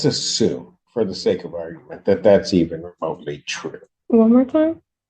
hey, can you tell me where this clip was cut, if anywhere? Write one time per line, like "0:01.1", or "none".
0:03.9